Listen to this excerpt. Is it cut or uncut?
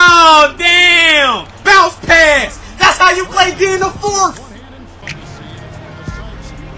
cut